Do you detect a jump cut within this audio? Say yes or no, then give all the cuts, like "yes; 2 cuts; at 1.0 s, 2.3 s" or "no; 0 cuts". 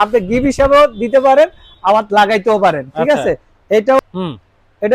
yes; 1 cut; at 4.0 s